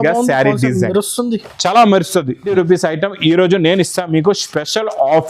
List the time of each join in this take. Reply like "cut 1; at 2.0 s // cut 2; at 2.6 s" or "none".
cut 1; at 2.5 s